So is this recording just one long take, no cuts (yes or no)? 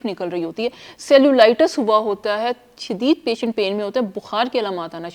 yes